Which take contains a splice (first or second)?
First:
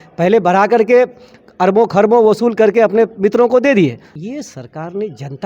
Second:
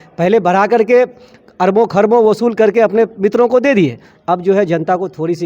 first